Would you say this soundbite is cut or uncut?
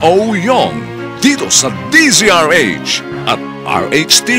uncut